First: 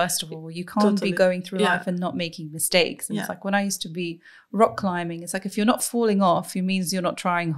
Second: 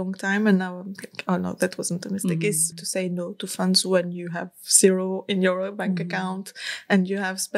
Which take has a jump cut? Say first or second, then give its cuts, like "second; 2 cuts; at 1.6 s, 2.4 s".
second; 1 cut; at 2.7 s